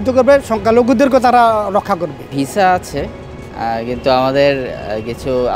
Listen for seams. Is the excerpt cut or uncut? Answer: uncut